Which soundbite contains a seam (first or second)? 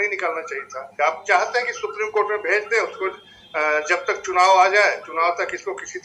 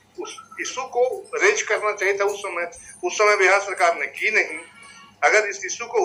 first